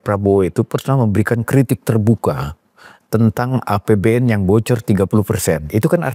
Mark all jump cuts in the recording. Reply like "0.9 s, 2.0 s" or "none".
none

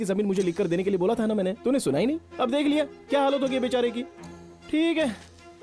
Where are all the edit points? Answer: none

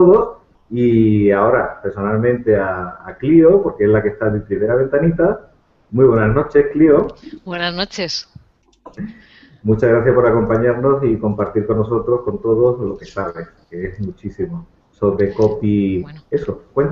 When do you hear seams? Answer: 11.6 s

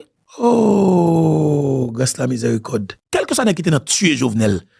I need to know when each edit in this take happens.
3.0 s

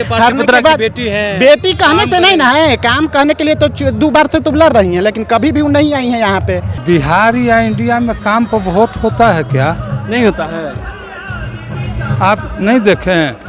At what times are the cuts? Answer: 6.7 s

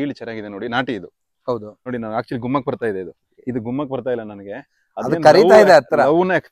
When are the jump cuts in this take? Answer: 1.9 s

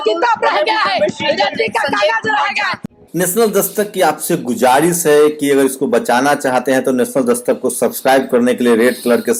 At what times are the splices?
none

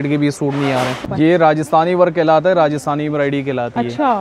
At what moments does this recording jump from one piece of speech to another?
1.0 s

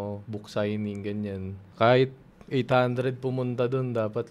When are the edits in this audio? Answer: 1.6 s

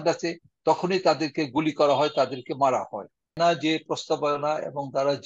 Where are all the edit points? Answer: 3.4 s

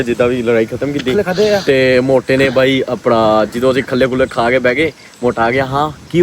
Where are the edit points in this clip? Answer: none

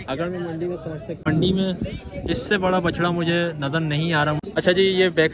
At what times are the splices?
1.2 s, 4.4 s

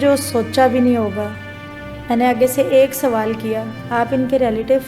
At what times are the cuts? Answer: 3.7 s

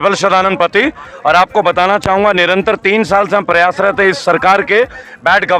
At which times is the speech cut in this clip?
none

